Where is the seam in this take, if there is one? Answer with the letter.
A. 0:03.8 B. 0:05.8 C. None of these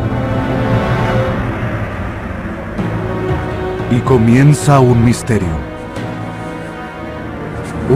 C